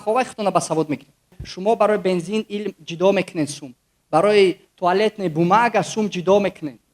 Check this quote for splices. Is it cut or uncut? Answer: cut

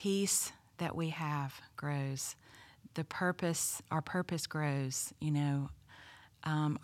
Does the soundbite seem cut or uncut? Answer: uncut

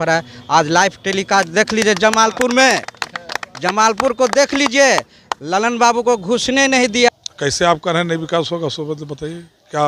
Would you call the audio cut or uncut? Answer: cut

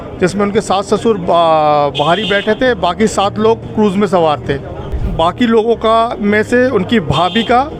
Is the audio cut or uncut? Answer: cut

